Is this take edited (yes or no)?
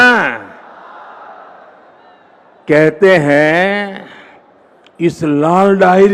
no